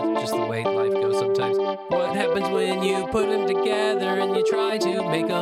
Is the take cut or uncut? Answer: uncut